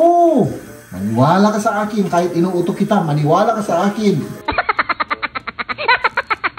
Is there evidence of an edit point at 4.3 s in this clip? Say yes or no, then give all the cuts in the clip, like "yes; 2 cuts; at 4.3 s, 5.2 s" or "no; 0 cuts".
yes; 1 cut; at 4.3 s